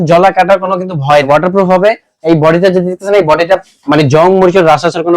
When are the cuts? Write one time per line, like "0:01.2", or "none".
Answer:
0:01.2